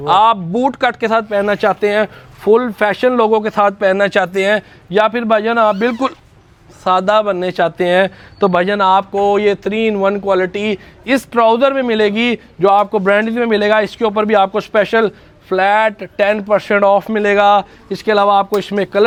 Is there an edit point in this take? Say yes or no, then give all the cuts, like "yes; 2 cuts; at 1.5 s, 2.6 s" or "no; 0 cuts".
no; 0 cuts